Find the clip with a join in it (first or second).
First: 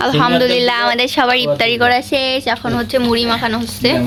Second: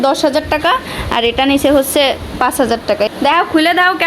second